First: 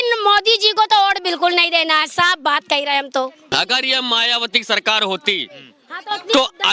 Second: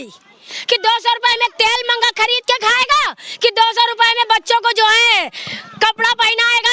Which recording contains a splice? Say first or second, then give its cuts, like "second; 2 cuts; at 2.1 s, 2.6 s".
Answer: first; 1 cut; at 3.5 s